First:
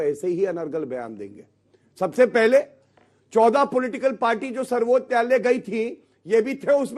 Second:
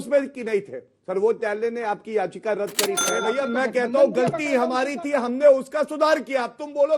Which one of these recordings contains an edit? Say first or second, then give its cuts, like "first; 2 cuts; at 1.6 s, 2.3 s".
second; 1 cut; at 3.0 s